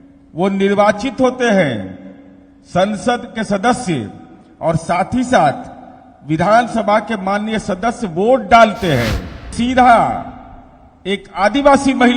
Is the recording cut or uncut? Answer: cut